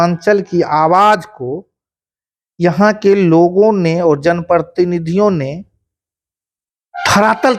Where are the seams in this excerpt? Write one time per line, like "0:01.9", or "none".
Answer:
none